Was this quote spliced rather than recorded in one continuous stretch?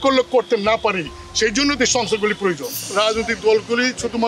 yes; 1 cut; at 2.8 s

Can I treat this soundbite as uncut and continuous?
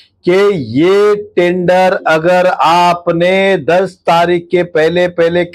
yes; 0 cuts

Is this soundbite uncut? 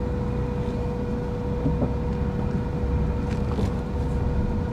yes; 0 cuts

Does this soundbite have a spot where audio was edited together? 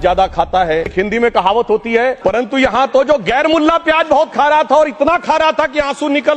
no; 0 cuts

